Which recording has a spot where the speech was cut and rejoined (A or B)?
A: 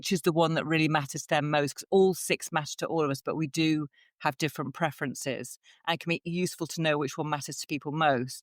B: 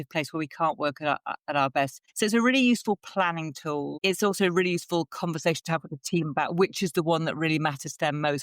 B